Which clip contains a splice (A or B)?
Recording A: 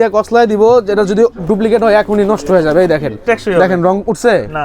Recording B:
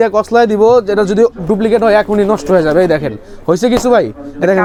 A